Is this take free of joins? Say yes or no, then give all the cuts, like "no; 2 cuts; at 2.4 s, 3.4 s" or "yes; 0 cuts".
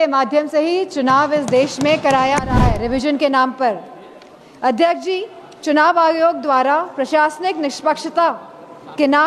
no; 1 cut; at 2.5 s